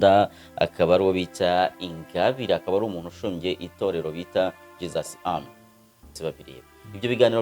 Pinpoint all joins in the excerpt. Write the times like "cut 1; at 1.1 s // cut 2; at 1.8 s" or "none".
cut 1; at 6.2 s